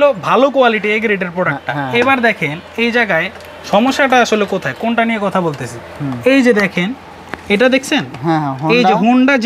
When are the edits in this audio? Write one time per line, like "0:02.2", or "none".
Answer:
none